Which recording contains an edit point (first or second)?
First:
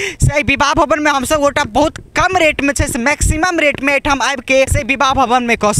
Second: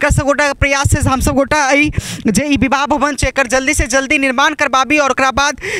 first